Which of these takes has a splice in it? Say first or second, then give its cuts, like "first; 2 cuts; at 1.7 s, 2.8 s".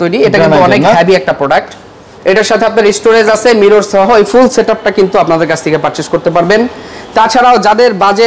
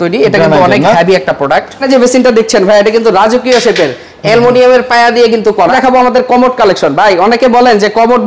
second; 2 cuts; at 1.8 s, 5.7 s